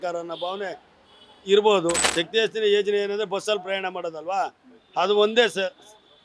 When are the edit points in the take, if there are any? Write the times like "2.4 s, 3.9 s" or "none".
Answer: 2.1 s

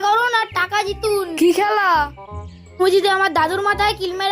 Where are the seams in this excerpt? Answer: 1.3 s

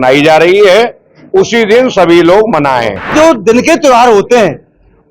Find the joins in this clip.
3.1 s

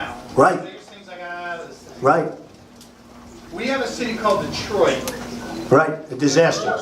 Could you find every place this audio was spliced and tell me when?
2.7 s

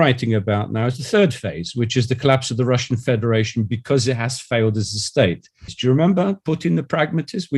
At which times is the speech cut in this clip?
5.7 s

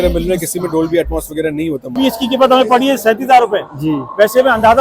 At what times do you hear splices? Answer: 2.0 s

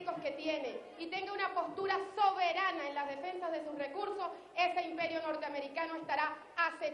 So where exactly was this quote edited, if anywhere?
4.4 s

